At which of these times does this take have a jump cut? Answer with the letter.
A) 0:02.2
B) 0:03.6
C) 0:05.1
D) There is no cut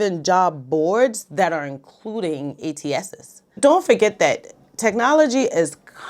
B